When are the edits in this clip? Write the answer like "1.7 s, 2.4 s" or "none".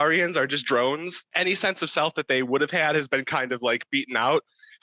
1.2 s

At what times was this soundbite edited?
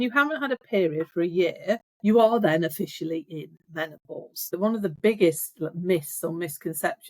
4.4 s

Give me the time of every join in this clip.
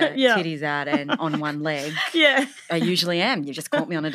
2.6 s

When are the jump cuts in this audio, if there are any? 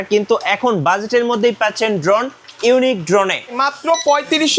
3.5 s

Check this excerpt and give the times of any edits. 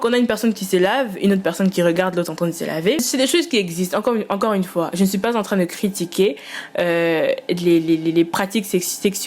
3.0 s

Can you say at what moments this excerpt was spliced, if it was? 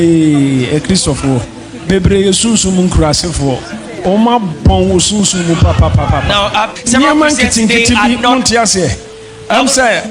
6.7 s, 9.1 s

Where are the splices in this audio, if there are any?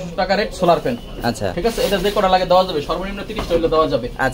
none

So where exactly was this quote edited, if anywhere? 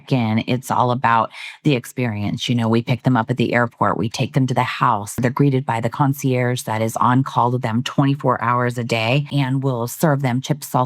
5.2 s, 9.3 s

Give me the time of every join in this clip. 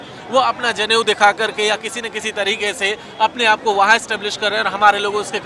none

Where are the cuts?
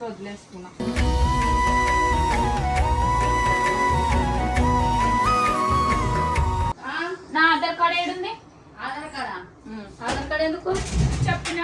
6.9 s

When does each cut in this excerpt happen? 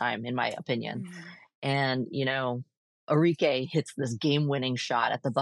none

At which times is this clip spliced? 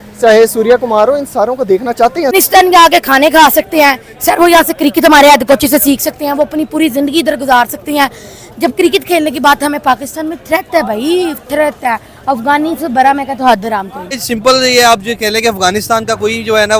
2.3 s, 14.2 s

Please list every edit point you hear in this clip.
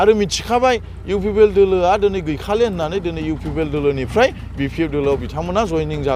none

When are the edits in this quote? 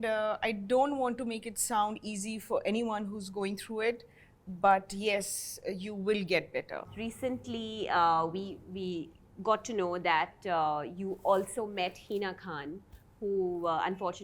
6.9 s

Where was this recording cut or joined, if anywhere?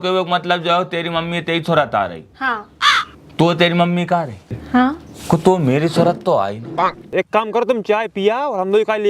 7.1 s

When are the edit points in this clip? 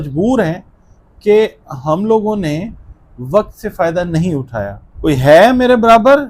4.8 s

